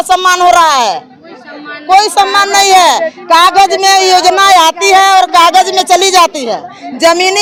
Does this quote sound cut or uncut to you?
uncut